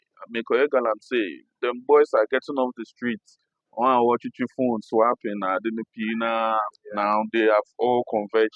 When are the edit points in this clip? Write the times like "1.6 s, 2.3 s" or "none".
none

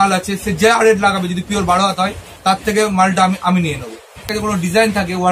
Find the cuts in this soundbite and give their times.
4.3 s

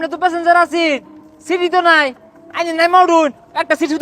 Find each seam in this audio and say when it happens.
none

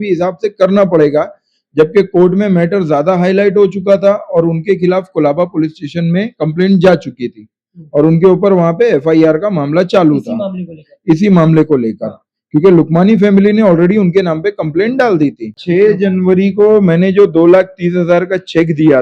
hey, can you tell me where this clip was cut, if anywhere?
15.5 s

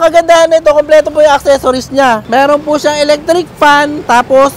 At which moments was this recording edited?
2.2 s

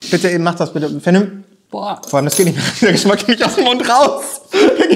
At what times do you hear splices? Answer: 1.7 s

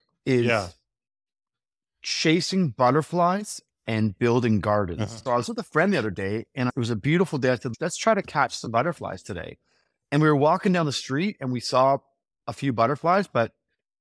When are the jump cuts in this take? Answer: 5.1 s, 6.7 s, 7.7 s

